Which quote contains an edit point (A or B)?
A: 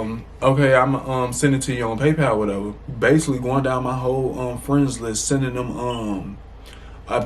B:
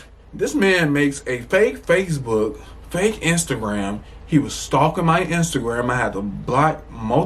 A